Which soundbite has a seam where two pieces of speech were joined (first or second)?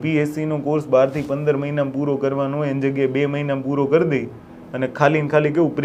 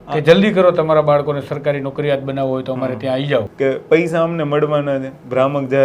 second